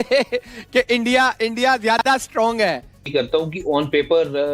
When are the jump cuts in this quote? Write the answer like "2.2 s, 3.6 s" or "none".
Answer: 3.1 s